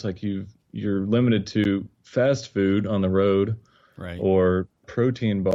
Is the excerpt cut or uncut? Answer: uncut